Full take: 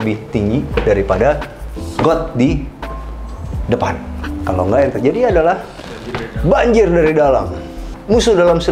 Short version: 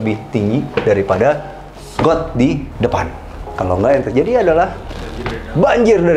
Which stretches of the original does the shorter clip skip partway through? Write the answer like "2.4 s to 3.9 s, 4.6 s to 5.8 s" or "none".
2.7 s to 3.6 s